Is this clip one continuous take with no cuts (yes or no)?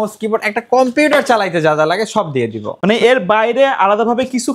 yes